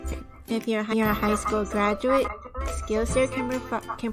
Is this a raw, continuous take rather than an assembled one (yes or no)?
yes